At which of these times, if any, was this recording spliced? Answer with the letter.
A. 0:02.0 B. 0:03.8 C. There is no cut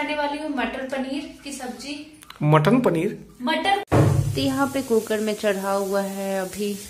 B